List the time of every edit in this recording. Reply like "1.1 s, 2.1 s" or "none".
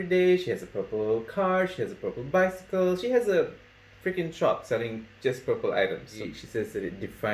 6.1 s